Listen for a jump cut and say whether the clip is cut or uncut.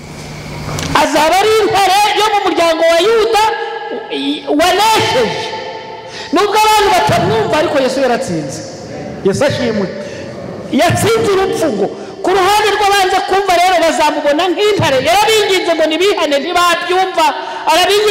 uncut